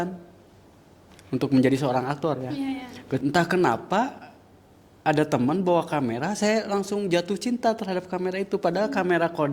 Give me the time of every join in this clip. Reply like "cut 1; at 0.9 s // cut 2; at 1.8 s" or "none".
cut 1; at 3.2 s